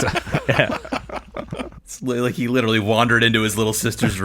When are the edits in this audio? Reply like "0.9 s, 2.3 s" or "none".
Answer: 1.9 s